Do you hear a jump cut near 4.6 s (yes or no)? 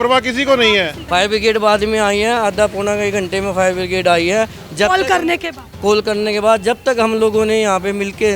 no